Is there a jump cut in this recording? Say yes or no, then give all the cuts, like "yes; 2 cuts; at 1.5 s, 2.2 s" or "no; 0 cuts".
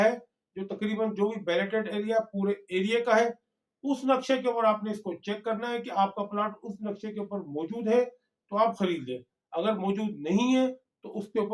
no; 0 cuts